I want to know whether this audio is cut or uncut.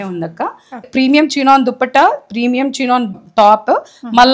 cut